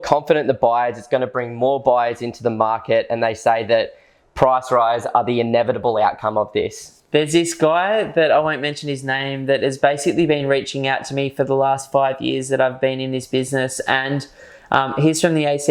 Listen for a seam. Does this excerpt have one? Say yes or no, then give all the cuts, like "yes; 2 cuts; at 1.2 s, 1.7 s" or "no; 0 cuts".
no; 0 cuts